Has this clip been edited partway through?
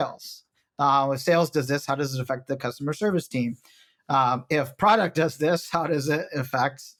no; 0 cuts

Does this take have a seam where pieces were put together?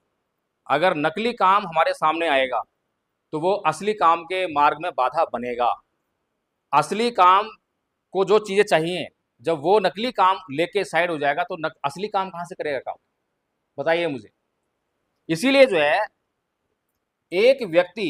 no; 0 cuts

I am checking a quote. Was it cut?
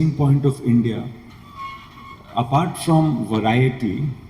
no; 0 cuts

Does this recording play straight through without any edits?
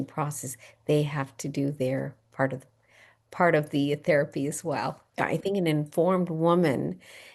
no; 1 cut; at 5.0 s

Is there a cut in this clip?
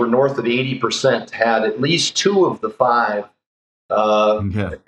no; 0 cuts

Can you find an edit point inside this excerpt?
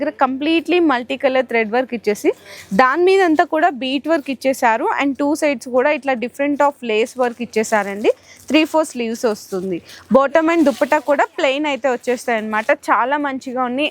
no; 0 cuts

